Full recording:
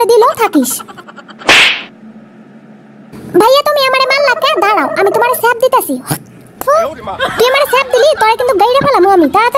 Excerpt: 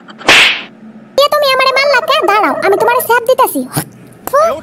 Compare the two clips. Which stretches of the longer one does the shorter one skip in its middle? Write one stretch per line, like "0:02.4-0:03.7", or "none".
0:02.4-0:03.5